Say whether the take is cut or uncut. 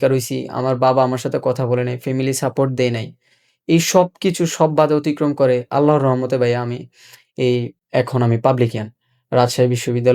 cut